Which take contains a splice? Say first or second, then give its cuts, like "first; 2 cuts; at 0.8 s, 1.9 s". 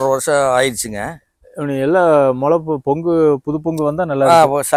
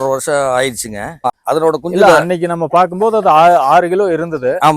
second; 1 cut; at 1.3 s